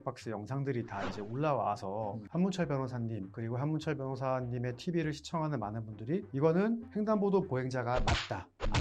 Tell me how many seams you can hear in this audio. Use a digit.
4